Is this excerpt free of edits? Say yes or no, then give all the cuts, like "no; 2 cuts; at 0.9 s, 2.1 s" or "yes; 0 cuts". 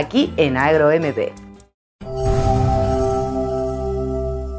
no; 1 cut; at 1.5 s